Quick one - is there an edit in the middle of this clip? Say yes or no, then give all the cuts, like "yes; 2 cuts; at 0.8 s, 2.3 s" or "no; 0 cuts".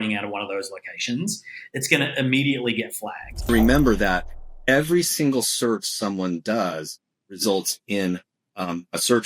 yes; 1 cut; at 3.3 s